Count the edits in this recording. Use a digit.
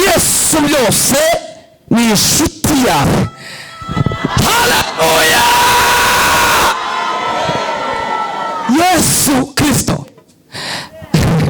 1